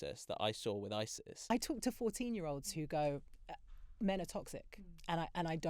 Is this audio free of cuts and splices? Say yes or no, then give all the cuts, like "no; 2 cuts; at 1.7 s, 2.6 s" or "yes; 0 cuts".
no; 1 cut; at 1.5 s